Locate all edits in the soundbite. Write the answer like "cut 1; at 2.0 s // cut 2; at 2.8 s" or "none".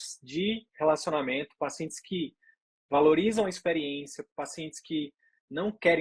none